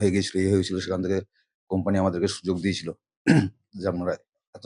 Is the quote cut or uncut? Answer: uncut